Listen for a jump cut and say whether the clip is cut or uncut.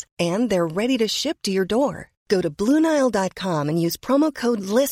uncut